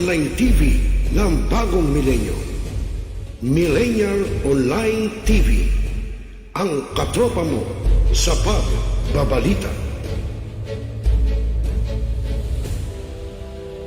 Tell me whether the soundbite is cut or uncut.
uncut